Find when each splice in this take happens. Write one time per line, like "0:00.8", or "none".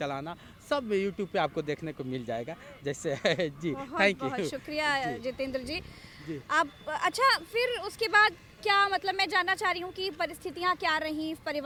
none